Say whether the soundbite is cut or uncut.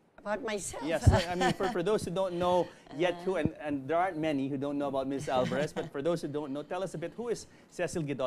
uncut